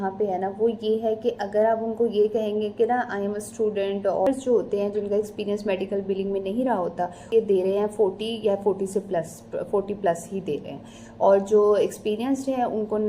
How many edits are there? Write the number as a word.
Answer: two